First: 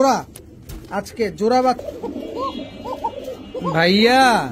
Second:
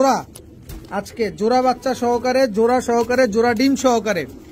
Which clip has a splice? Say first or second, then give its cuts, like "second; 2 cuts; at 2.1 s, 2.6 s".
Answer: first; 1 cut; at 1.8 s